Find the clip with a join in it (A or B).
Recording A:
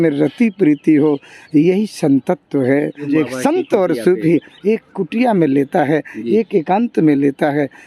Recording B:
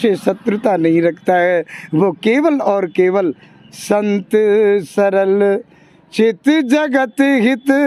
A